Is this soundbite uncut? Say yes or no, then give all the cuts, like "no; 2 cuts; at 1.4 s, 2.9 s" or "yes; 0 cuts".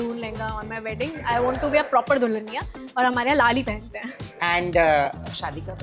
yes; 0 cuts